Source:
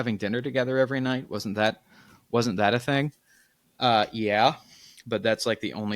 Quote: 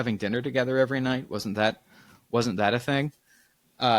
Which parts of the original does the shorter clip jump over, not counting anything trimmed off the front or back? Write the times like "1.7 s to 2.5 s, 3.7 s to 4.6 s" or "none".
none

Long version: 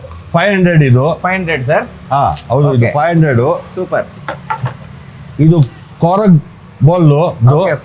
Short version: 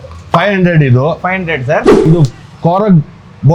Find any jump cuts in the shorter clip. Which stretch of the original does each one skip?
2.1 s to 5.4 s

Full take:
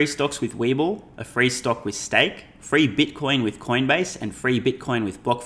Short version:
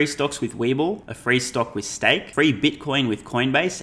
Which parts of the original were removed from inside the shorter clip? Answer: 1.1 s to 1.2 s, 2.4 s to 2.6 s

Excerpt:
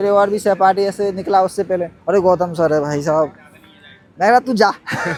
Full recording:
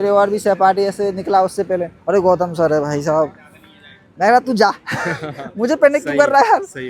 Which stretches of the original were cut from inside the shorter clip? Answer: none

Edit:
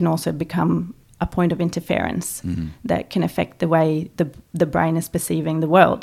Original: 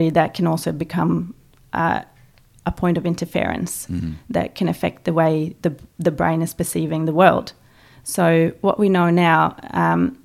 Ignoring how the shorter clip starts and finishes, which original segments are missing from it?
1.4 s to 2.5 s

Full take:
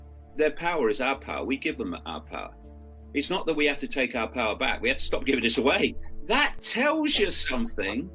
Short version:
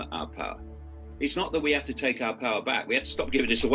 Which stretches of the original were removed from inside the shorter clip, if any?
none

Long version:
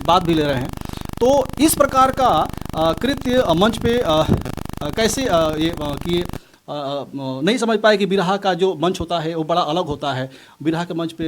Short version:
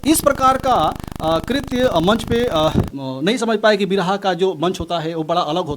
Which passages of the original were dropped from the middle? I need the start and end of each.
4.5 s to 7.2 s

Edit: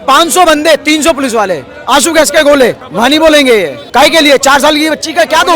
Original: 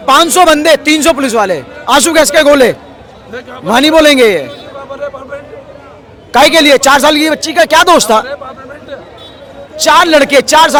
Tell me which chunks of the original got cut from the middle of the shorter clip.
2.8 s to 3.6 s, 4.5 s to 6.2 s

